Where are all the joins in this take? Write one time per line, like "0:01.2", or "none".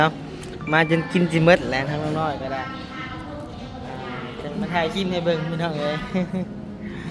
none